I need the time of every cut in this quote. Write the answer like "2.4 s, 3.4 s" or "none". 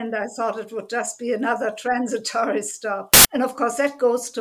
3.1 s